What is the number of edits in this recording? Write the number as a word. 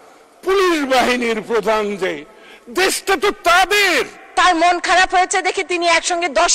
one